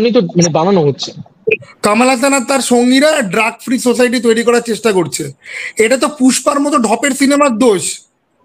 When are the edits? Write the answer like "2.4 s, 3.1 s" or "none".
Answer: 1.7 s